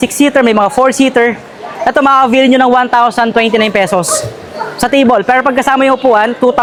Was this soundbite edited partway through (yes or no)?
no